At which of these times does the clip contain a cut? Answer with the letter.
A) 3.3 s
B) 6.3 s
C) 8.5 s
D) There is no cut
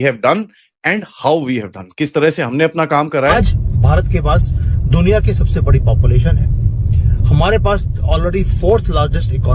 A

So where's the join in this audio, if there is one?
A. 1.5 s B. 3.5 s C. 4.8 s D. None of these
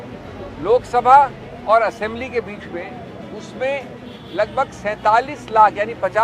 A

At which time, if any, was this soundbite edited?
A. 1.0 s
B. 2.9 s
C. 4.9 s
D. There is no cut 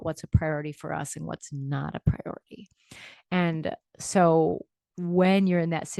D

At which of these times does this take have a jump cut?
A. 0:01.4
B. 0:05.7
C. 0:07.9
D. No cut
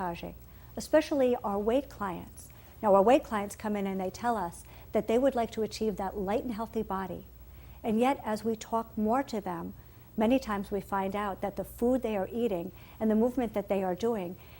B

